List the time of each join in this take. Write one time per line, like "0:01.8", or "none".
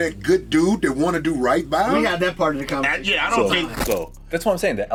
none